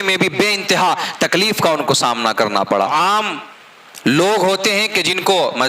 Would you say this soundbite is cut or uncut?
cut